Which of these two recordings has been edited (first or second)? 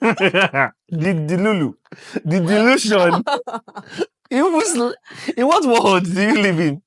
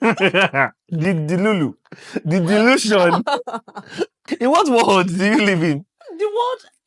second